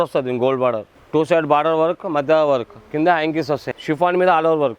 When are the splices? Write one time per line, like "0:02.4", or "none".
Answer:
0:00.9
0:03.7